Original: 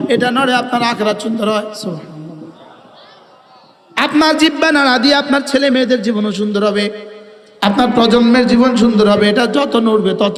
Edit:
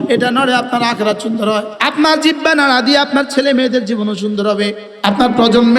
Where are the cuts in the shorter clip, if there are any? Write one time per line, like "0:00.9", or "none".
0:01.7
0:04.9